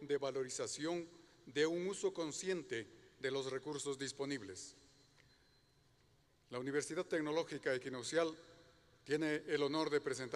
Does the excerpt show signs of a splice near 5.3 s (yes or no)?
no